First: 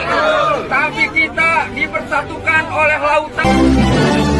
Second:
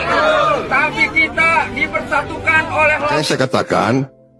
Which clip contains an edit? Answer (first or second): second